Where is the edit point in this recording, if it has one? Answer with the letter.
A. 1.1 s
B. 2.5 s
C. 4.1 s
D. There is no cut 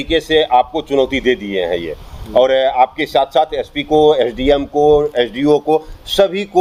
D